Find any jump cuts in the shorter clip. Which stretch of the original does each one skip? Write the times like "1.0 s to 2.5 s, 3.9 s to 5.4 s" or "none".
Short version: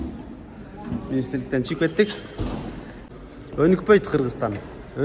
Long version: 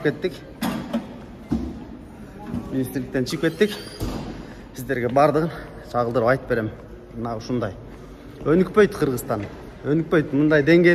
4.7 s to 7.9 s